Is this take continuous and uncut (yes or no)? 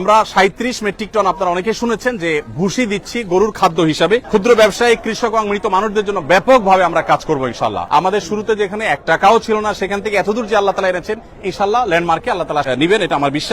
no